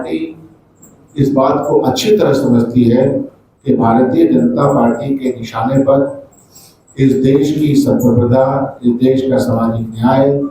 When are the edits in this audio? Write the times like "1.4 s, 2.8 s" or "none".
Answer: none